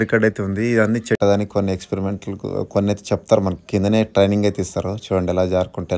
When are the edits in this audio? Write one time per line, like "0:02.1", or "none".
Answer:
0:01.2